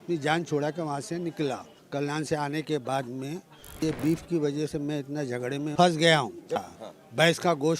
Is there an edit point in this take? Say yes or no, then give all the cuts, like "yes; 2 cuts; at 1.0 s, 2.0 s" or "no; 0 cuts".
yes; 4 cuts; at 1.7 s, 3.8 s, 5.7 s, 6.6 s